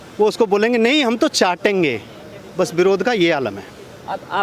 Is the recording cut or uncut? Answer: uncut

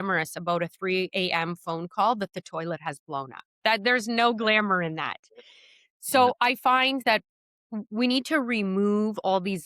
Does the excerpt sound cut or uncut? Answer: uncut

